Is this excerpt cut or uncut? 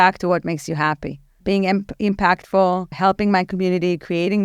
cut